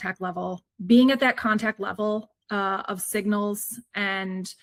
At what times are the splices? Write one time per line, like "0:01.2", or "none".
none